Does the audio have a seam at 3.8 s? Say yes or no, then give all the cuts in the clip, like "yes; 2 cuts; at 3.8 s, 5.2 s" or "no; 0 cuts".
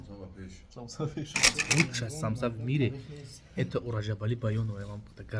no; 1 cut; at 1.5 s